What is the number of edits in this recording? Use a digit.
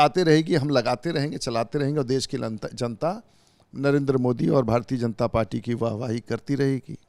0